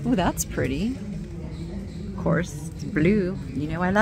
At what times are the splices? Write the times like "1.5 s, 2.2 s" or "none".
none